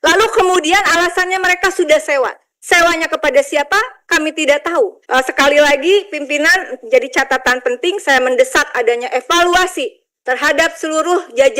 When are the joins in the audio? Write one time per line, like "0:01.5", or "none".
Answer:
0:05.0

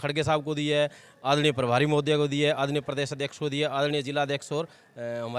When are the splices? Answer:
none

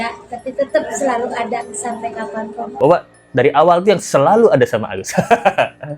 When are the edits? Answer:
0:02.7

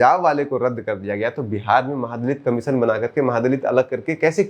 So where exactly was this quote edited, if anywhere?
none

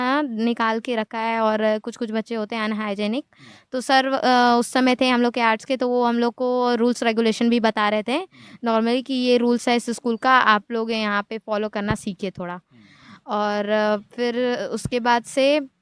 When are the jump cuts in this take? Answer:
none

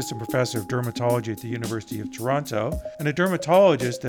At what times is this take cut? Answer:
0:02.9

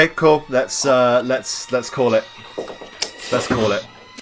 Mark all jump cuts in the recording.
none

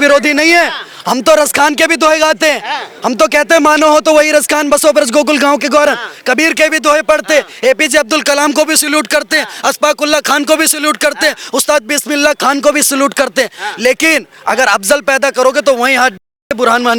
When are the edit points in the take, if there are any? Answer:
none

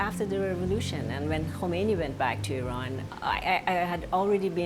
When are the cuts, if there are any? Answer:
none

